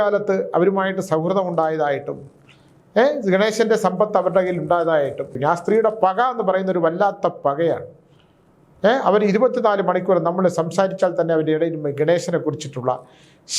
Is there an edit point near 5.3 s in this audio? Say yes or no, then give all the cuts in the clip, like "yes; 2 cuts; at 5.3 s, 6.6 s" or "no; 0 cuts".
yes; 1 cut; at 5.3 s